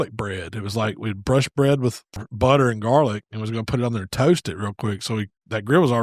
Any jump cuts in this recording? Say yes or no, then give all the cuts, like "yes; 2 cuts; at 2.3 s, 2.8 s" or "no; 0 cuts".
yes; 1 cut; at 2.2 s